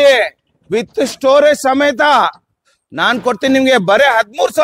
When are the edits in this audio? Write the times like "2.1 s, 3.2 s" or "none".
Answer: none